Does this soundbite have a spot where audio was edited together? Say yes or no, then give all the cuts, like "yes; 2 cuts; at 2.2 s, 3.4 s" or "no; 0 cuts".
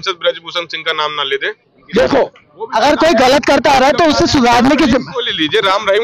yes; 1 cut; at 1.7 s